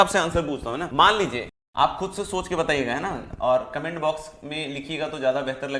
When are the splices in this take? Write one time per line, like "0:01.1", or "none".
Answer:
0:00.9
0:01.6